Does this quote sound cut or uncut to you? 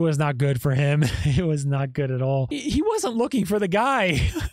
cut